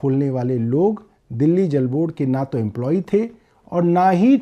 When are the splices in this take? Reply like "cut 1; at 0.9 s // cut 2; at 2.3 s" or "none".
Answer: none